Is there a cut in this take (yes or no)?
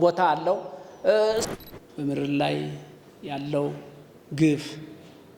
yes